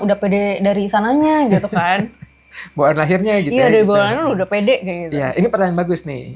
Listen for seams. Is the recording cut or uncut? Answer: uncut